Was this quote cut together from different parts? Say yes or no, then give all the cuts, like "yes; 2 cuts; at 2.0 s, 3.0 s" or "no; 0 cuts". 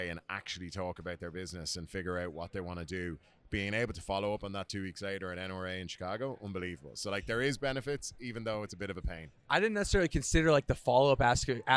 no; 0 cuts